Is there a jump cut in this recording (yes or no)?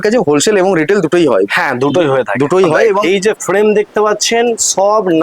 yes